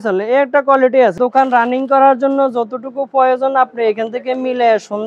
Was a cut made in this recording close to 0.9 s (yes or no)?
yes